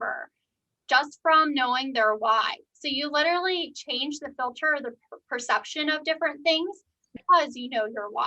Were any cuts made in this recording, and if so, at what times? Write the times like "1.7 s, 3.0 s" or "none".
7.1 s